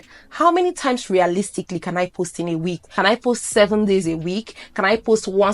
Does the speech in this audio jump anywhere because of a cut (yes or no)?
yes